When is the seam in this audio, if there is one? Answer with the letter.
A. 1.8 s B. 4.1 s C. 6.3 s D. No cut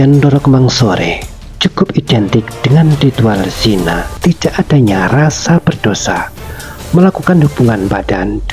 B